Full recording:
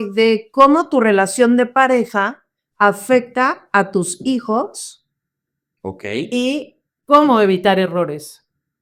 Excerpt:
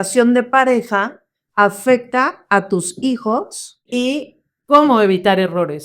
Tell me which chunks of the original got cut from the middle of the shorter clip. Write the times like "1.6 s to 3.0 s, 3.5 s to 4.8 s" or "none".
5.1 s to 6.3 s